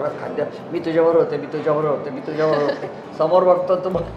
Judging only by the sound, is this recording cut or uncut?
uncut